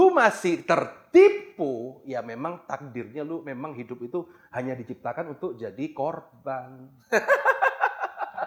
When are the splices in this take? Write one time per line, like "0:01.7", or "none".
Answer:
none

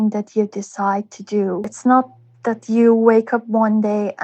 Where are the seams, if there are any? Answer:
0:01.7

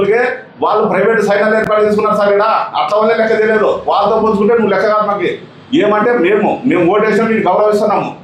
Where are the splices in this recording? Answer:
none

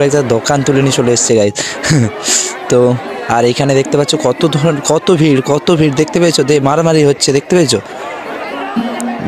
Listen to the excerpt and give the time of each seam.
none

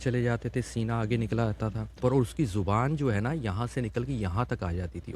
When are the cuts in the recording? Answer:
0:01.9

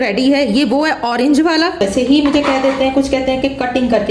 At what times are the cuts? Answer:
0:01.8

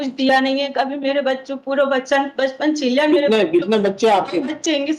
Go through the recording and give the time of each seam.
none

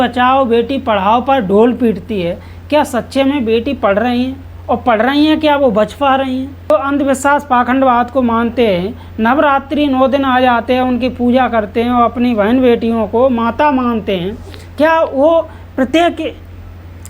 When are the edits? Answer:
0:06.7

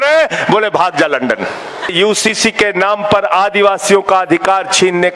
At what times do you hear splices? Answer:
0:01.9

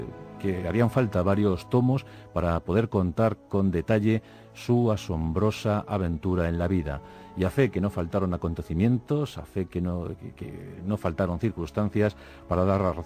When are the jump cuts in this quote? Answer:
0:09.0

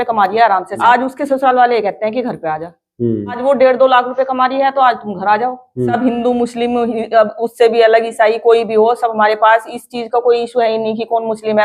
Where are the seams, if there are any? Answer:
0:00.8
0:03.4
0:05.9

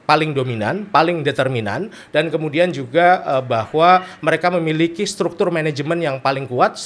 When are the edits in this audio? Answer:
none

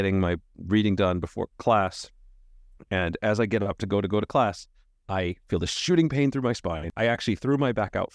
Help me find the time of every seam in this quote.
0:06.9

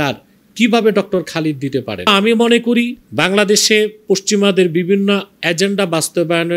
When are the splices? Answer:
0:02.1
0:03.0

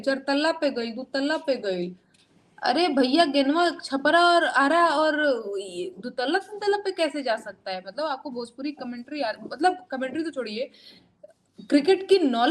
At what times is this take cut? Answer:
none

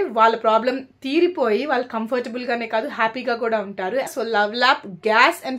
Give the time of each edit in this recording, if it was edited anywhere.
0:04.1

